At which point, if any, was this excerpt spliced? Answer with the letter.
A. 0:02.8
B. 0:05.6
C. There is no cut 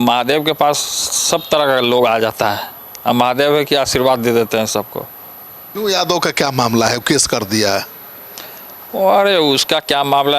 B